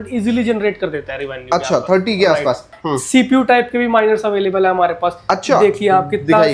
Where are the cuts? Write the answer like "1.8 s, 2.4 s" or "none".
2.8 s